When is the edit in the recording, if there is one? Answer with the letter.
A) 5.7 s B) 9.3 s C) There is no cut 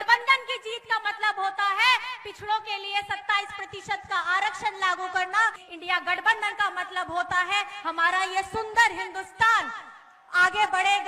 A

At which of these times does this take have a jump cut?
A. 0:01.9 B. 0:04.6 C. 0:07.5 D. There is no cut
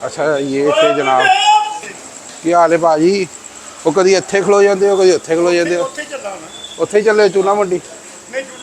A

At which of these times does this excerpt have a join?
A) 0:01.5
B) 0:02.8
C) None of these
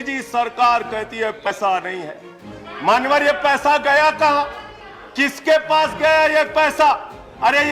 A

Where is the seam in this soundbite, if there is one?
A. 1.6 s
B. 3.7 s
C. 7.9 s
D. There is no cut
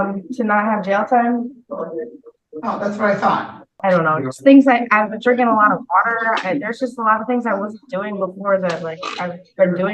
B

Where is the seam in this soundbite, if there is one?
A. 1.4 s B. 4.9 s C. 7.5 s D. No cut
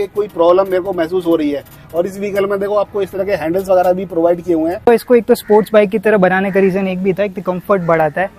B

